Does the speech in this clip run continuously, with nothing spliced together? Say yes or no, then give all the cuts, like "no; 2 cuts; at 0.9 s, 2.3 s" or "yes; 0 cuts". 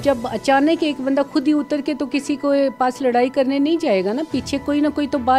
yes; 0 cuts